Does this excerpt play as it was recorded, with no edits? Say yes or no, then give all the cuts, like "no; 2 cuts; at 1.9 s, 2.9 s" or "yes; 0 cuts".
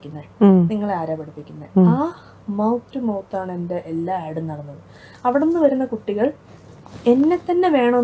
yes; 0 cuts